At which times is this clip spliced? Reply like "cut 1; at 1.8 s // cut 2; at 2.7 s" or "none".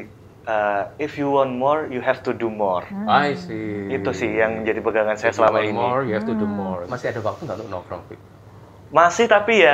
cut 1; at 6.8 s